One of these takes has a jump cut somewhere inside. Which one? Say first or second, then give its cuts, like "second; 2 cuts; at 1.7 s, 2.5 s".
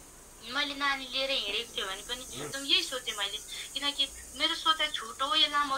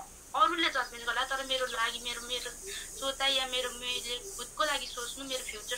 first; 1 cut; at 2.5 s